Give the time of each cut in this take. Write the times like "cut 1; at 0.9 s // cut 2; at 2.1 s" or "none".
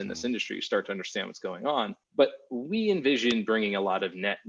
cut 1; at 2.0 s